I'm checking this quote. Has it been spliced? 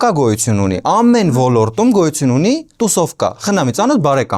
no; 0 cuts

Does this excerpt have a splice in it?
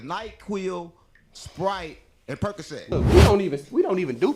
yes; 1 cut; at 2.9 s

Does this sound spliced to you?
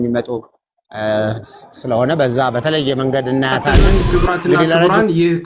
yes; 1 cut; at 3.7 s

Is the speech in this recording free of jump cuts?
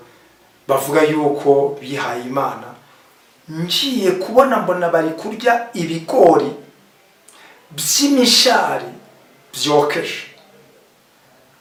yes; 0 cuts

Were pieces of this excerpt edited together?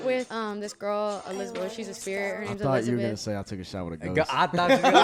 no; 0 cuts

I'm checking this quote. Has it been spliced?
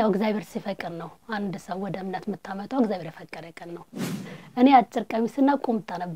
yes; 1 cut; at 4.3 s

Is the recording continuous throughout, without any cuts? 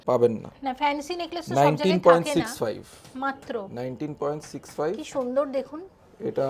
yes; 0 cuts

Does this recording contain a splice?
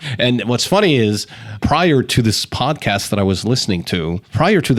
no; 0 cuts

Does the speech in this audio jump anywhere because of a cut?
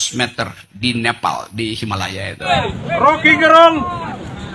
yes; 1 cut; at 2.4 s

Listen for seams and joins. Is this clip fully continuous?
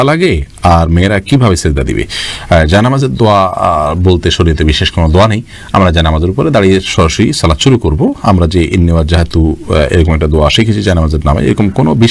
yes; 0 cuts

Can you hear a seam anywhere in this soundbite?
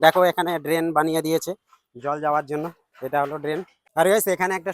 no; 0 cuts

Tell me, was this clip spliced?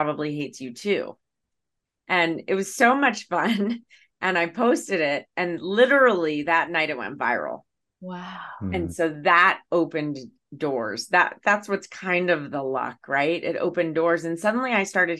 no; 0 cuts

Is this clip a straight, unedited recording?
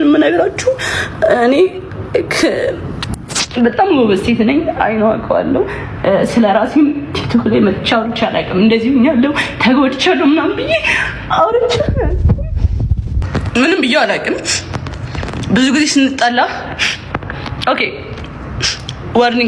yes; 0 cuts

